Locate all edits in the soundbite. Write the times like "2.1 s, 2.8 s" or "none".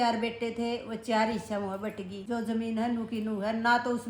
2.2 s